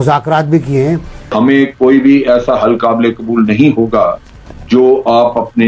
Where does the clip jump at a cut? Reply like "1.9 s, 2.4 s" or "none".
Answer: 1.3 s